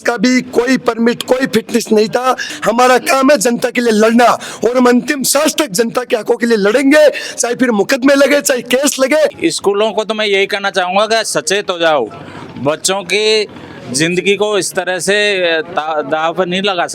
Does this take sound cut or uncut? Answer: cut